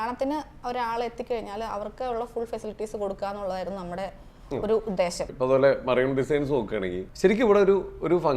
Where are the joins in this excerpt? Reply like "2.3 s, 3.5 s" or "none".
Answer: 5.3 s, 7.0 s